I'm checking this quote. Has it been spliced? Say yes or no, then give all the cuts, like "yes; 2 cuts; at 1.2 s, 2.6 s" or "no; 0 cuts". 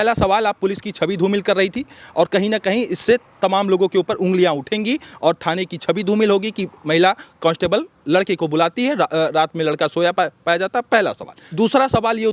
no; 0 cuts